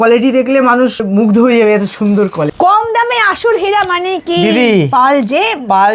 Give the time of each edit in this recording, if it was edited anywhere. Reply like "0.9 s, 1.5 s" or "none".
2.5 s